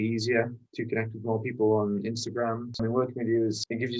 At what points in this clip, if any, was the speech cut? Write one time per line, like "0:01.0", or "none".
0:02.7